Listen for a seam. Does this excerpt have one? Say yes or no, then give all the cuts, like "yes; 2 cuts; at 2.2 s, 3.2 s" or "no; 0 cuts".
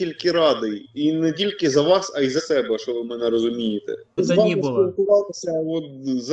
yes; 1 cut; at 4.2 s